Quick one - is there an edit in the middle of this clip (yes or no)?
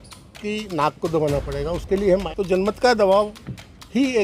yes